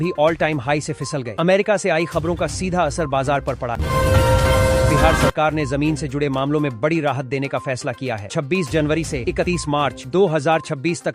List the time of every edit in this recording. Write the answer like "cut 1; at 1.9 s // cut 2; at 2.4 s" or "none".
cut 1; at 3.8 s // cut 2; at 5.2 s